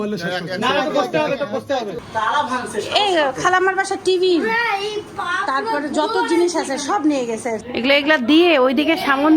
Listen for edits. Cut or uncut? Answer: cut